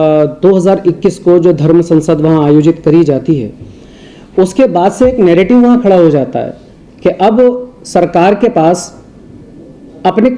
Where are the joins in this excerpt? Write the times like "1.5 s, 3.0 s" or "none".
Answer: none